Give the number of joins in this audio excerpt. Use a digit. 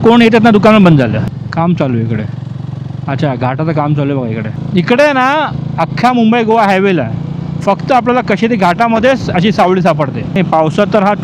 3